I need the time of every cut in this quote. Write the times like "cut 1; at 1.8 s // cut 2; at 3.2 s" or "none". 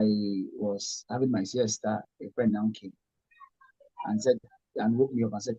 cut 1; at 2.1 s